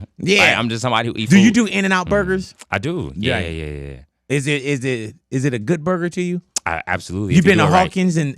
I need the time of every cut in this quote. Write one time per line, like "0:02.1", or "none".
0:01.2